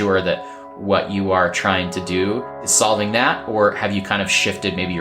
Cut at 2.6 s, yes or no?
yes